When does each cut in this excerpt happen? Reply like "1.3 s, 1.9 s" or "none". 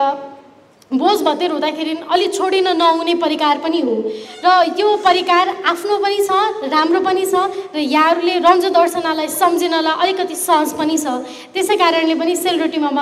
none